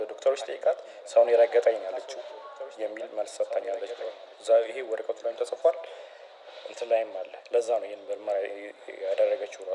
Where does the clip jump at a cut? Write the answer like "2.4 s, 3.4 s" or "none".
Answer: none